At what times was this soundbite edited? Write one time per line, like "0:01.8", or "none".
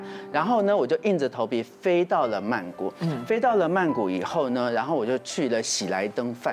none